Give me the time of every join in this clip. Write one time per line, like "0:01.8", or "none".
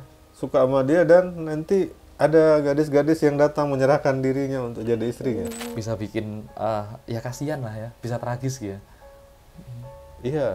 0:05.6